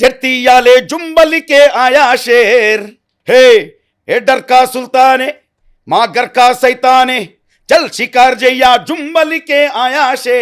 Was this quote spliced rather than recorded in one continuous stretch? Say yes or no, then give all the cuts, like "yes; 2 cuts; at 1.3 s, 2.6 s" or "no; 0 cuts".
no; 0 cuts